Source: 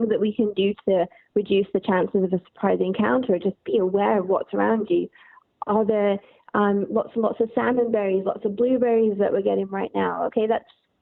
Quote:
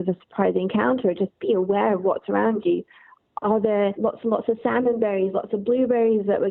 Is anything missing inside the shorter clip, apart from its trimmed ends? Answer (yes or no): yes